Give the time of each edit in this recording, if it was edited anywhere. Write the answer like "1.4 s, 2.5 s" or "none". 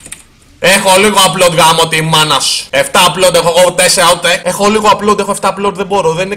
2.5 s, 4.4 s